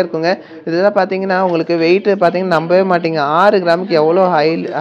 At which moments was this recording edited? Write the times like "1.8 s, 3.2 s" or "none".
none